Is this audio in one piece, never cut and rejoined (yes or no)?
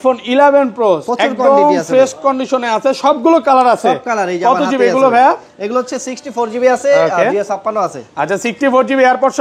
yes